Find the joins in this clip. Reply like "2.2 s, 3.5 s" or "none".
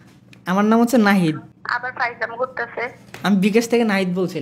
1.5 s